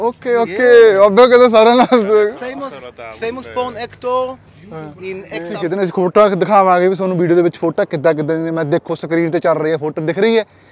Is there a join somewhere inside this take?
yes; 1 cut; at 5.6 s

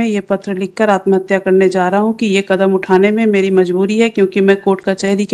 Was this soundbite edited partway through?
no; 0 cuts

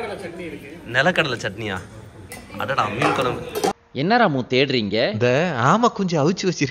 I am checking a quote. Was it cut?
no; 0 cuts

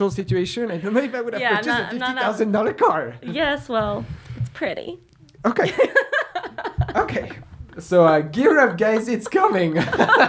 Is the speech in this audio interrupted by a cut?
no; 0 cuts

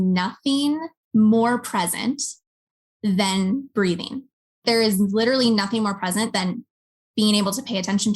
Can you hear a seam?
yes; 2 cuts; at 0.9 s, 4.6 s

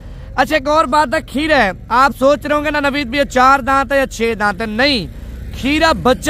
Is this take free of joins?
yes; 0 cuts

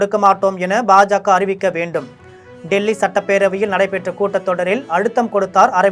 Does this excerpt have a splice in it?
no; 0 cuts

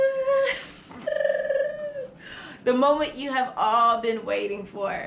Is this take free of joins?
no; 1 cut; at 1.0 s

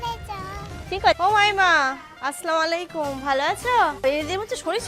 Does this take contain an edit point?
yes; 1 cut; at 1.2 s

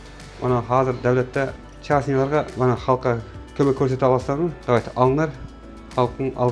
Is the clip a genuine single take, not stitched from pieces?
no; 2 cuts; at 1.7 s, 2.5 s

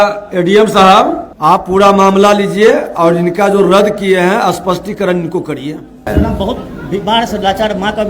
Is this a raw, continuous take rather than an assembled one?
no; 2 cuts; at 1.3 s, 6.0 s

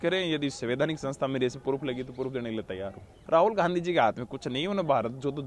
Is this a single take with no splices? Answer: no; 1 cut; at 3.2 s

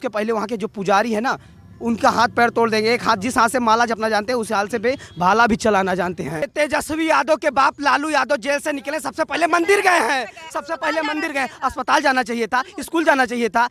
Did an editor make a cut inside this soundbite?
yes; 1 cut; at 6.4 s

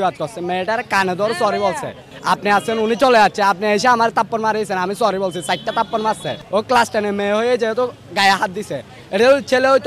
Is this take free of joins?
no; 2 cuts; at 2.1 s, 6.3 s

